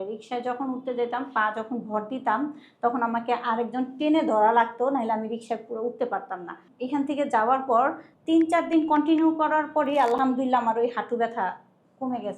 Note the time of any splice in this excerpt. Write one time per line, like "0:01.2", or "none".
0:06.7
0:08.1